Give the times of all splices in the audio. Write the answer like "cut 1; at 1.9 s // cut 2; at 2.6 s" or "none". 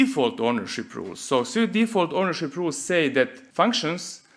cut 1; at 3.4 s